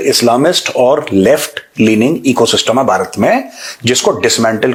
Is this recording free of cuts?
yes; 0 cuts

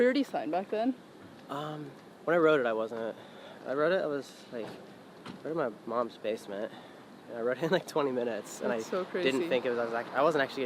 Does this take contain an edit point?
no; 0 cuts

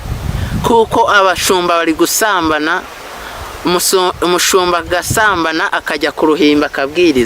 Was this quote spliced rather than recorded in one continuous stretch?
no; 0 cuts

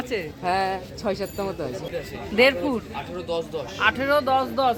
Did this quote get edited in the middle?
yes; 1 cut; at 1.9 s

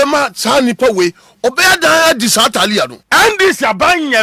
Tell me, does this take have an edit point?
yes; 1 cut; at 3.0 s

